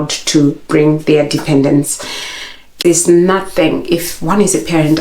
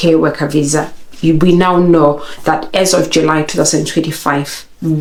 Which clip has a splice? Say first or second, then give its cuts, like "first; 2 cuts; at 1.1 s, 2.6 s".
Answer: first; 1 cut; at 2.8 s